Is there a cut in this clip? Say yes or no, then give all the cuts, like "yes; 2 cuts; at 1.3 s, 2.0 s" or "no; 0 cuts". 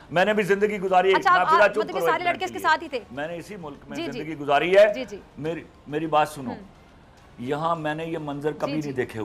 no; 0 cuts